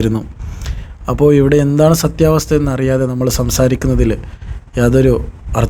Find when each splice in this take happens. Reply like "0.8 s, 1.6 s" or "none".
none